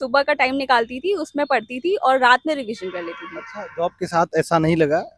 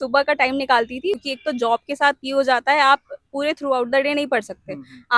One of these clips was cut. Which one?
second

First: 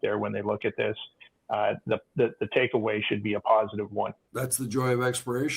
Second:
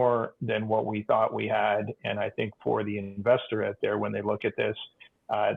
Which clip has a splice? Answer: first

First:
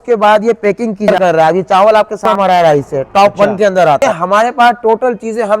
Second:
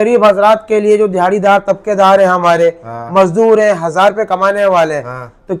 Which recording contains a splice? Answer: first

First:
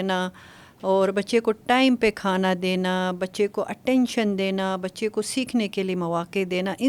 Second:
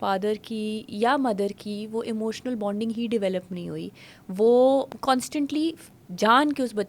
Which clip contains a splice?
second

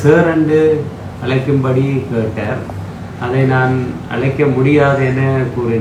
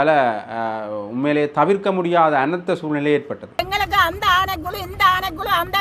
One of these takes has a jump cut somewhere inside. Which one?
second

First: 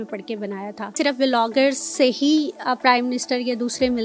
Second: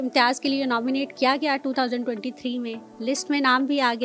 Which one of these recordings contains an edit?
first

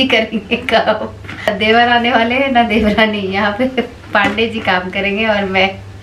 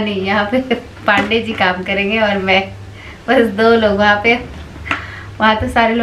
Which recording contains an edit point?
first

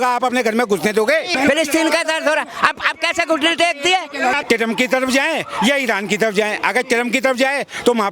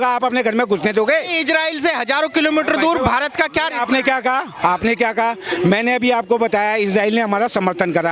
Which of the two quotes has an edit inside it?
first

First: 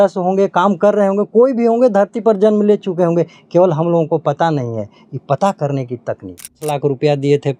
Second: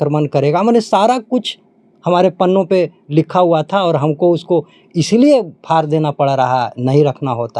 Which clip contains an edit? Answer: first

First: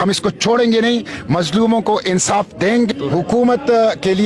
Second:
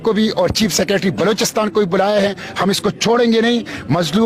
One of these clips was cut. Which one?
first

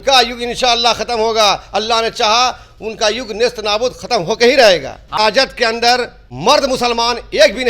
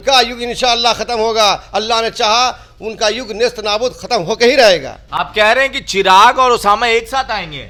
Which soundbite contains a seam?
first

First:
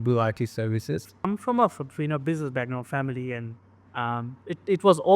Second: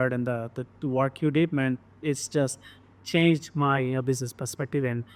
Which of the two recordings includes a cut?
first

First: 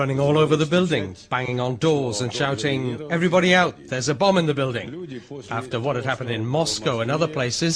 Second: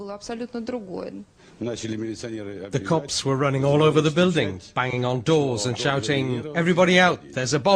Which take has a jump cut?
second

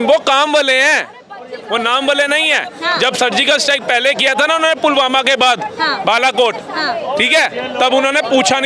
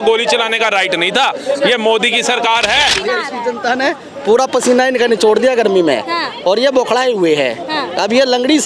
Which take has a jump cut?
second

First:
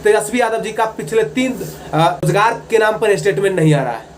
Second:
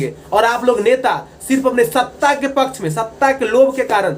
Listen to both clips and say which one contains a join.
first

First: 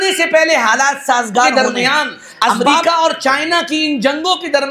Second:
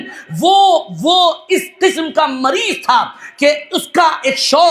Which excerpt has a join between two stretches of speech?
first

